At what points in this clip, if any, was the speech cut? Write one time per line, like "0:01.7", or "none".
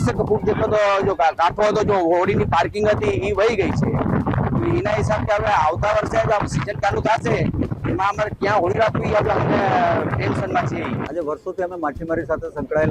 none